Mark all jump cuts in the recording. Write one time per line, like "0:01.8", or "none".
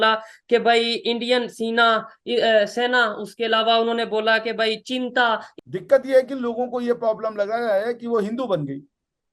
0:05.5